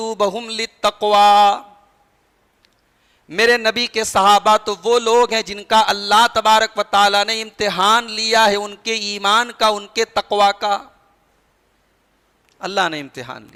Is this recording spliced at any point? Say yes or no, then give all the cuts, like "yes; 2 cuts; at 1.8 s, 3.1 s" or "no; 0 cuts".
no; 0 cuts